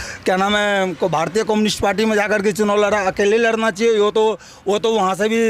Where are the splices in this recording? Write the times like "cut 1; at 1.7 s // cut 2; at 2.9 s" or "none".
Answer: none

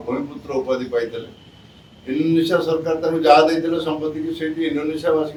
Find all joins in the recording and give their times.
none

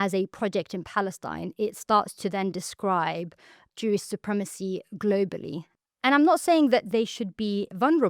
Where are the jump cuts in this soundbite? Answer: cut 1; at 5.7 s

